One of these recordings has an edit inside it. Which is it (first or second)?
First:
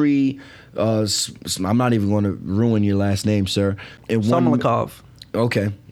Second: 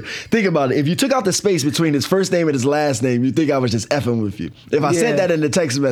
first